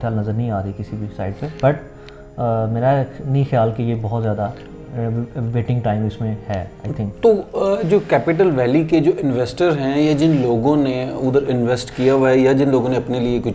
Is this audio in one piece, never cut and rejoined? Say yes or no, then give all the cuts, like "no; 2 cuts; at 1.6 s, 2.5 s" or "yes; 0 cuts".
yes; 0 cuts